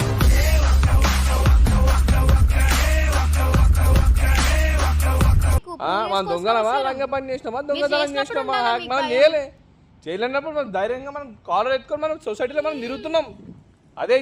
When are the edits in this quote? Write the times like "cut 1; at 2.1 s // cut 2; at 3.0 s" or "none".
cut 1; at 5.6 s